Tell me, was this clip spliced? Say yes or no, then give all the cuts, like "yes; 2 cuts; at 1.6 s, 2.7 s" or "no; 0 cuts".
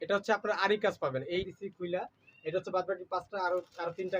yes; 1 cut; at 1.5 s